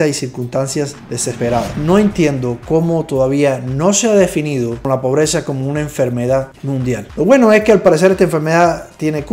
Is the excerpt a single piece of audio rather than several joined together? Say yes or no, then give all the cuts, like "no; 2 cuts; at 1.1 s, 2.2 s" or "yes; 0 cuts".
no; 2 cuts; at 1.7 s, 7.1 s